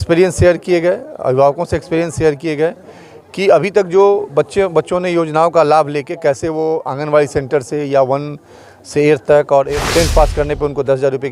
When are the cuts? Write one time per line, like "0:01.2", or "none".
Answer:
0:09.8